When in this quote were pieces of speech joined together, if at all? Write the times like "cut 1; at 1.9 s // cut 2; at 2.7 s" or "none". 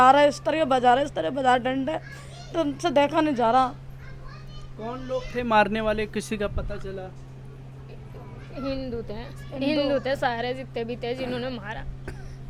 none